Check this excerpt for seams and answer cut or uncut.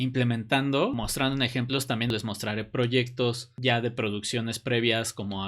cut